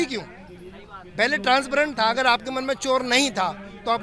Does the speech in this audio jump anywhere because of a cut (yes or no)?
no